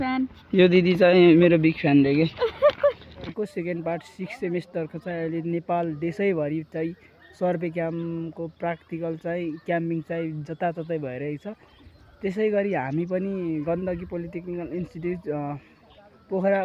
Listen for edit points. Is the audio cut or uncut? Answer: cut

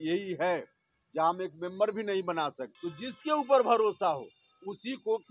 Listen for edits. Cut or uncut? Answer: cut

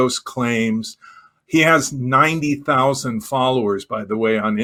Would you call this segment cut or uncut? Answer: uncut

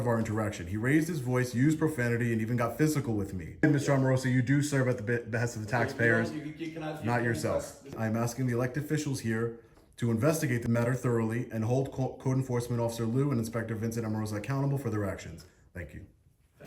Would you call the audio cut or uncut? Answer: cut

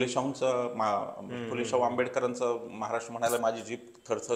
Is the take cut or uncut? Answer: uncut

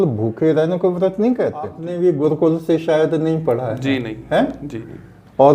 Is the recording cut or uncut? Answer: cut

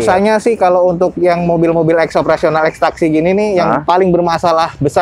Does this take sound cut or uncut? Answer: uncut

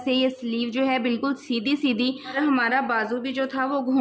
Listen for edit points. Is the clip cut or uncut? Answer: cut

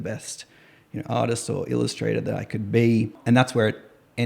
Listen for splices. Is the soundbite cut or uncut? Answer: cut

